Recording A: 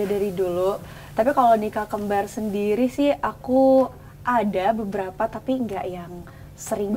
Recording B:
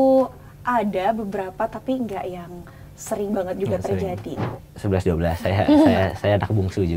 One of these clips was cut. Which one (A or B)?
B